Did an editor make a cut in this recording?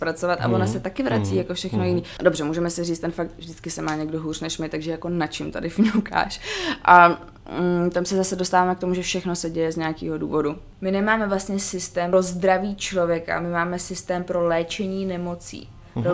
yes; 3 cuts; at 2.1 s, 10.7 s, 12.1 s

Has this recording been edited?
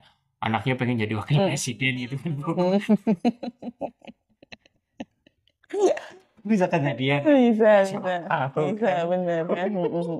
no; 0 cuts

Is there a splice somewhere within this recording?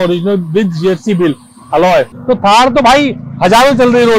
yes; 1 cut; at 2.1 s

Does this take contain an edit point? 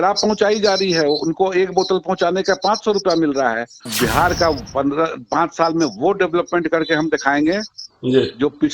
yes; 1 cut; at 3.9 s

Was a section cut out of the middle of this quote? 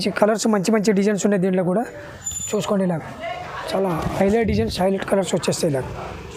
no; 0 cuts

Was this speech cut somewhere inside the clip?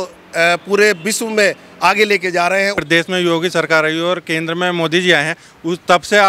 yes; 1 cut; at 2.8 s

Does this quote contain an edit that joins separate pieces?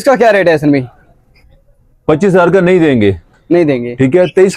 no; 0 cuts

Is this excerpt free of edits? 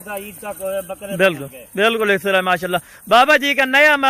yes; 0 cuts

